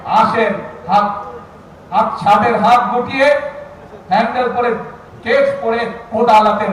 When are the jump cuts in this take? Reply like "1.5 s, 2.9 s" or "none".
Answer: none